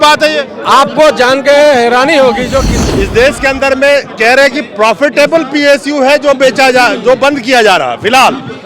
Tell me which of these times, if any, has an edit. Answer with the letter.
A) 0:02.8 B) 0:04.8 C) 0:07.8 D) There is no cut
A